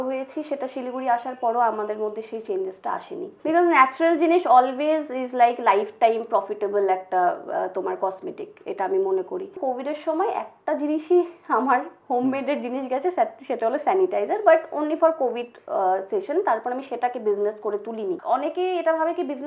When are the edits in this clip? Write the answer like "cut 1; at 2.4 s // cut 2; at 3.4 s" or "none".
cut 1; at 3.4 s // cut 2; at 9.6 s // cut 3; at 18.2 s